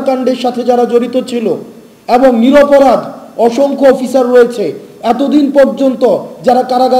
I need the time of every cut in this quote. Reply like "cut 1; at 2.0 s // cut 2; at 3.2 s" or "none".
none